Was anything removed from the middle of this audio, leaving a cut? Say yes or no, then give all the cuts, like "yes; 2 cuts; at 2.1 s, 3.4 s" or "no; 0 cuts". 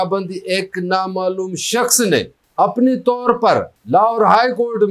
yes; 2 cuts; at 2.4 s, 3.7 s